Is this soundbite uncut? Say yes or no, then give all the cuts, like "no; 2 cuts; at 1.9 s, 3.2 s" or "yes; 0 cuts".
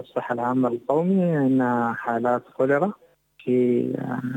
no; 1 cut; at 3.4 s